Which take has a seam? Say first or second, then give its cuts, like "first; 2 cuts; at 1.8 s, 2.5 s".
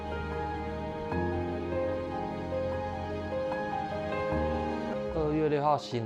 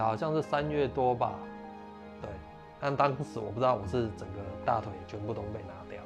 first; 1 cut; at 4.9 s